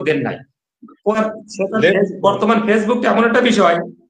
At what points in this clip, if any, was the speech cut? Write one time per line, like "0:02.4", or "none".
0:01.1

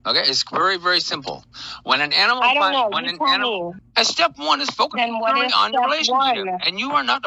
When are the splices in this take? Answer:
0:03.8

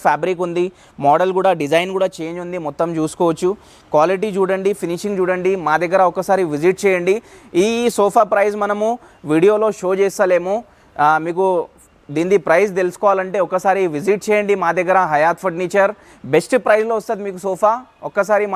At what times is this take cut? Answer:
none

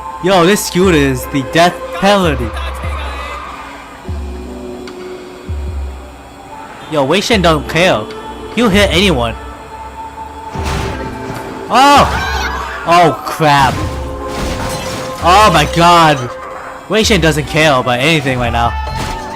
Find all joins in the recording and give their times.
0:09.0

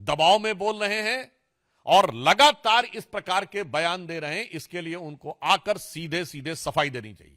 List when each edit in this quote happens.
none

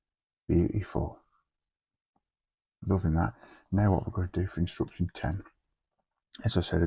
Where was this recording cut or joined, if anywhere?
none

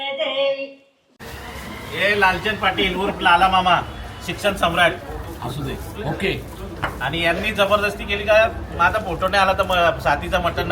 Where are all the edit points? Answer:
0:01.1

